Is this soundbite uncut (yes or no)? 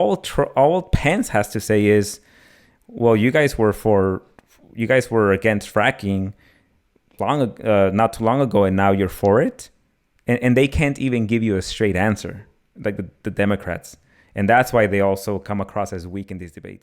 yes